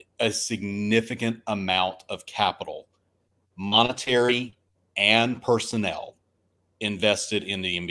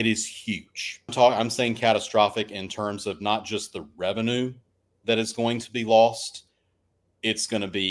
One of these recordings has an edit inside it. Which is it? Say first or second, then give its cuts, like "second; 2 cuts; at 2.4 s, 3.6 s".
second; 1 cut; at 1.1 s